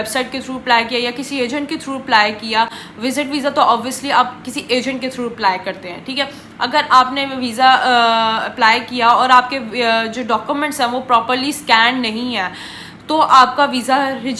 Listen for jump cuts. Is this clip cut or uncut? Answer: uncut